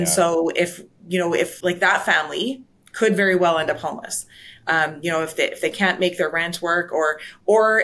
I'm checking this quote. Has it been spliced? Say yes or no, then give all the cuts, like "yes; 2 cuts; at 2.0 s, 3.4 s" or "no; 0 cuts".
no; 0 cuts